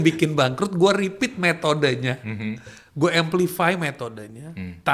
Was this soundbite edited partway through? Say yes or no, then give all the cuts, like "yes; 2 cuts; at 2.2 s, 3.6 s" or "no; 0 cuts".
no; 0 cuts